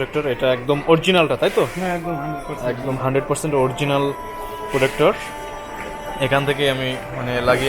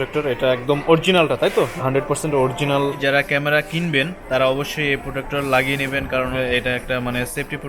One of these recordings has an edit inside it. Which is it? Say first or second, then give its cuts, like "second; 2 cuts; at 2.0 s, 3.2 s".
second; 2 cuts; at 1.8 s, 3.0 s